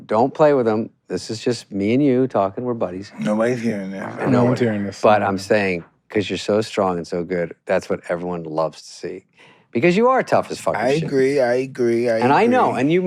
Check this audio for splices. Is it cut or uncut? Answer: uncut